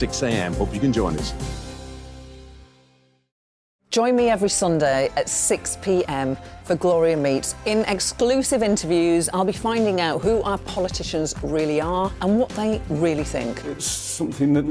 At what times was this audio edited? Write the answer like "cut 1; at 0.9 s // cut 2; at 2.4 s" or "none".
cut 1; at 3.5 s